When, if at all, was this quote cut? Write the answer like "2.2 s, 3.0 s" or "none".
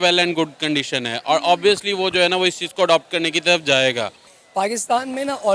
4.2 s